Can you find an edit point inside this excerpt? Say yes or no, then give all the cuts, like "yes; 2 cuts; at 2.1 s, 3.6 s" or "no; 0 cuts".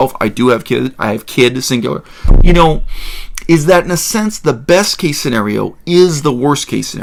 no; 0 cuts